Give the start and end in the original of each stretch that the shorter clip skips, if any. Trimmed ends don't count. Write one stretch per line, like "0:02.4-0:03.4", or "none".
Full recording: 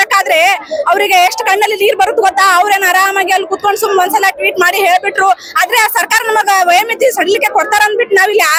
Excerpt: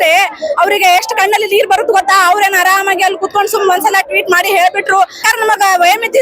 0:05.5-0:06.1